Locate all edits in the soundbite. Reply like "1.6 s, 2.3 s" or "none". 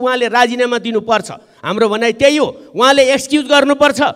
none